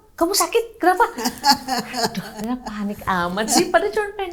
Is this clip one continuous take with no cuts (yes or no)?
yes